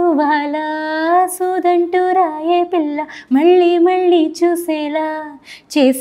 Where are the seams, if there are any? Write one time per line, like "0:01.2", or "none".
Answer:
none